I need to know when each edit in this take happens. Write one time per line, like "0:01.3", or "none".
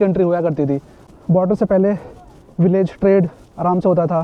0:01.0